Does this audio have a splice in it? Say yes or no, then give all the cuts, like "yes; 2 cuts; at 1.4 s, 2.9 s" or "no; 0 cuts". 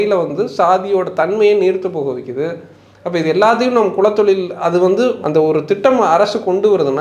yes; 1 cut; at 5.2 s